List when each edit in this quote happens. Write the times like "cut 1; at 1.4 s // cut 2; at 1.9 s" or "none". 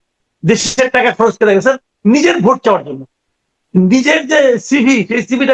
none